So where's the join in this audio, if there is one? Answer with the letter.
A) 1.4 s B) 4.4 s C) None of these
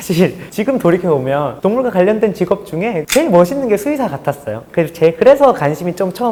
C